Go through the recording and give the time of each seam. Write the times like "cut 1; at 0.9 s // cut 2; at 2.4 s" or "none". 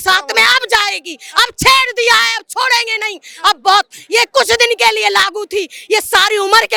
none